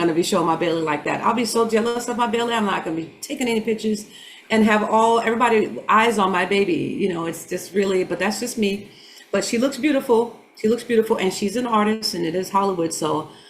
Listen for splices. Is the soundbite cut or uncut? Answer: uncut